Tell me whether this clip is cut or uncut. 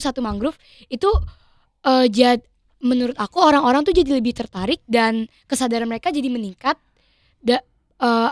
uncut